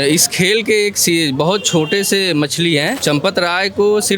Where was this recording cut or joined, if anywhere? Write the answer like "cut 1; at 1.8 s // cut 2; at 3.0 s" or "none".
cut 1; at 3.0 s

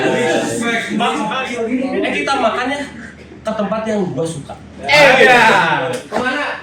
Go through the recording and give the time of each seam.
cut 1; at 1.3 s

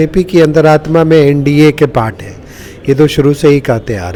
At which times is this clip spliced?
none

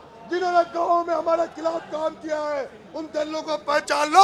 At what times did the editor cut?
none

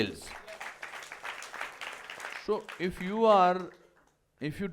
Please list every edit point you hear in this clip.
cut 1; at 2.3 s

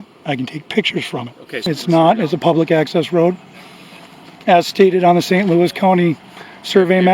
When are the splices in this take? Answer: cut 1; at 1.7 s

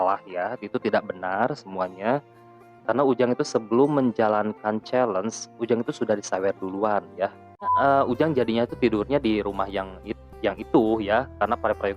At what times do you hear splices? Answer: cut 1; at 7.7 s

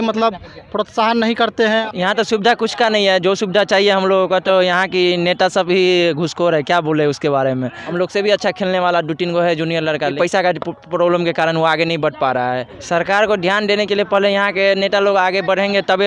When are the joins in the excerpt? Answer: cut 1; at 1.8 s // cut 2; at 4.4 s // cut 3; at 7.8 s // cut 4; at 10.1 s // cut 5; at 12.7 s

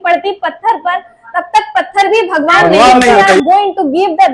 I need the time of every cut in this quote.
cut 1; at 3.3 s

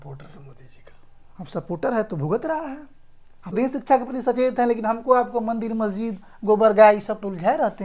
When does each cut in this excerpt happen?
cut 1; at 3.5 s

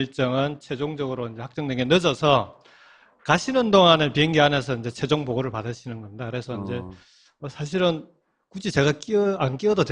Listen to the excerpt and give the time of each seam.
cut 1; at 5.3 s

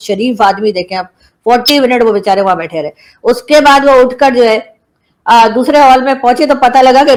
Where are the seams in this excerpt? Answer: none

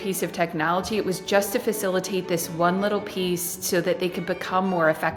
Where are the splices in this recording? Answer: none

